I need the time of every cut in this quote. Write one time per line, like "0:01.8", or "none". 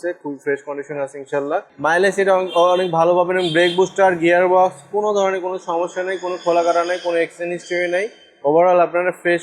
0:01.7